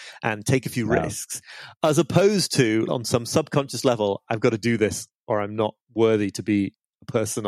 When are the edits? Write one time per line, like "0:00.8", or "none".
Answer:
0:02.9
0:05.8